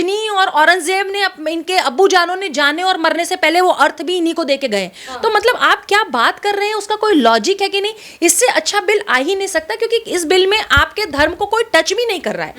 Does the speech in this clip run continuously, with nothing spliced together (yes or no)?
yes